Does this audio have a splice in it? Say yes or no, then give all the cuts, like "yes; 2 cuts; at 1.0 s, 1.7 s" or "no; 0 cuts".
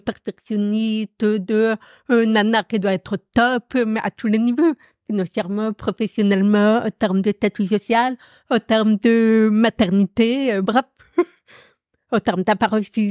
no; 0 cuts